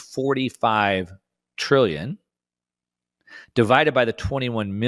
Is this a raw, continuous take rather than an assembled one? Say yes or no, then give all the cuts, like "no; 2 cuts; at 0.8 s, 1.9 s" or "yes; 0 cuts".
yes; 0 cuts